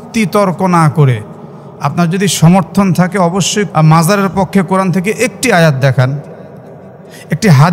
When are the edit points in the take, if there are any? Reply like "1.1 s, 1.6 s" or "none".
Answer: 3.7 s